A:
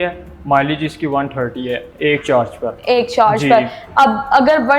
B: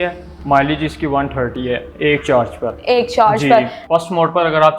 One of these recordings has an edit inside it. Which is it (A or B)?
B